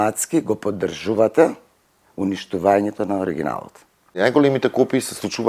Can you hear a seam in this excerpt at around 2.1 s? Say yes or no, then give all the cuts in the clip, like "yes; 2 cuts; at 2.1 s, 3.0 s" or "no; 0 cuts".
no; 1 cut; at 4.1 s